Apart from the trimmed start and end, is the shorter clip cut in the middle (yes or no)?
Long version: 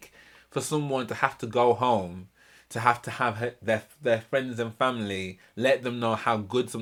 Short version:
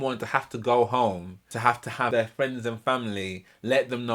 yes